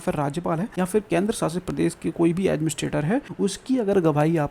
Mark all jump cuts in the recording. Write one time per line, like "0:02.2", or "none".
0:01.0
0:03.3